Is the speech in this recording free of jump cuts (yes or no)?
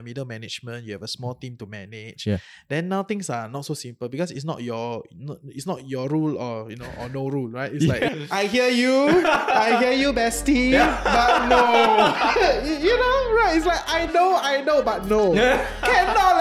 no